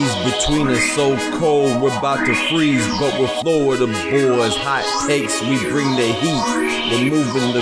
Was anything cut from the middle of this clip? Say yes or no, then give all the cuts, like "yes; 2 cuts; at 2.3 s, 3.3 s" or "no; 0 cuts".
no; 0 cuts